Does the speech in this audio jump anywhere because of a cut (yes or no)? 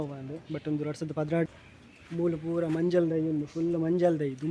yes